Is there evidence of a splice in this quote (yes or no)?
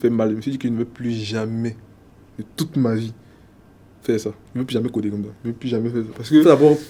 no